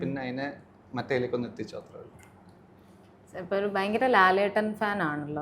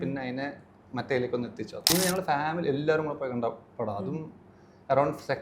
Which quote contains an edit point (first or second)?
second